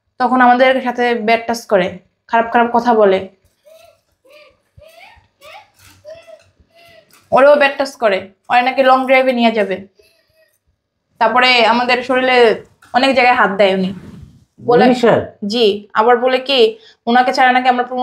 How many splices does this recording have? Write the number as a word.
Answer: zero